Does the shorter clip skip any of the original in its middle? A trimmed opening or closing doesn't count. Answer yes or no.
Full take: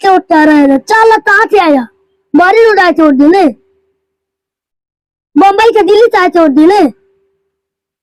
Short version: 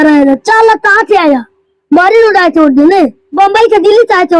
yes